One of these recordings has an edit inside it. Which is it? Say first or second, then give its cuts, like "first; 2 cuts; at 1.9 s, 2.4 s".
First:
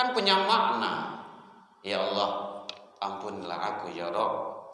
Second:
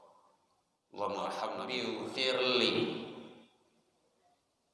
second; 1 cut; at 1.7 s